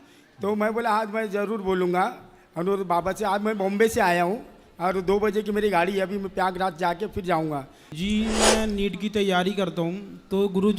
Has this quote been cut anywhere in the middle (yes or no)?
yes